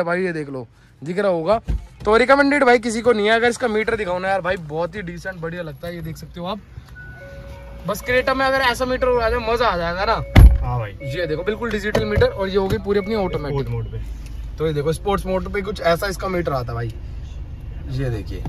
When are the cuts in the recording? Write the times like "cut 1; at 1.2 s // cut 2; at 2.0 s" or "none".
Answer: none